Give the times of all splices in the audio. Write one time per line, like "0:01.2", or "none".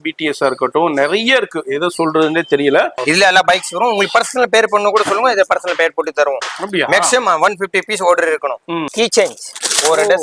0:03.0
0:08.9